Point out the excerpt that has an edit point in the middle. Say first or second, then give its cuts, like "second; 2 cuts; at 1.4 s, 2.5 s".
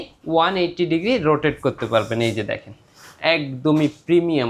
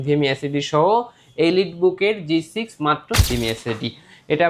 second; 1 cut; at 3.3 s